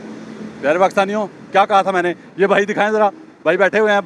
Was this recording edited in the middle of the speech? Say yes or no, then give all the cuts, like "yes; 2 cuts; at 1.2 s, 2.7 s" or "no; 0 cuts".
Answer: no; 0 cuts